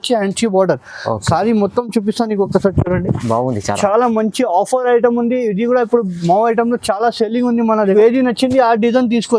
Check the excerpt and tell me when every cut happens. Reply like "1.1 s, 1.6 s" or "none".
7.9 s